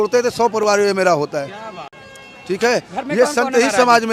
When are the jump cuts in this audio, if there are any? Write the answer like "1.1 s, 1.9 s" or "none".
none